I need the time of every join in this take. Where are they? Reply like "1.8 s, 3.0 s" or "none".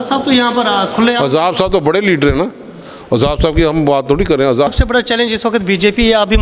4.7 s

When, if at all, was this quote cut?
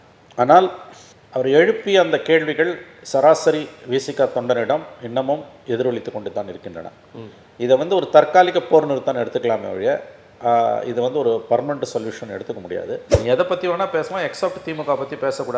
13.1 s

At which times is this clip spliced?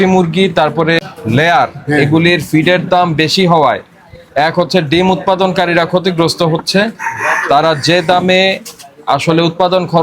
1.0 s

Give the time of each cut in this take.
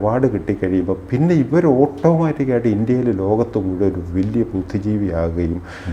none

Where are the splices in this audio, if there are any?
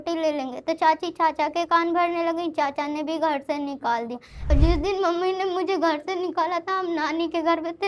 4.5 s

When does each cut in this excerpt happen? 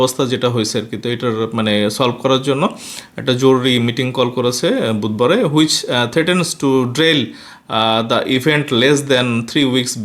none

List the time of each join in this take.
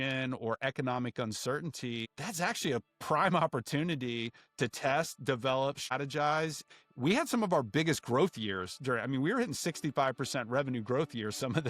2.2 s, 5.9 s, 6.7 s

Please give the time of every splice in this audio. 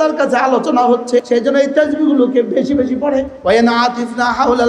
1.3 s, 3.3 s

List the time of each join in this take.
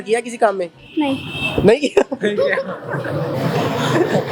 none

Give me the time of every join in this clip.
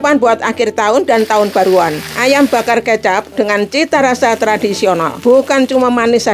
2.1 s, 5.1 s

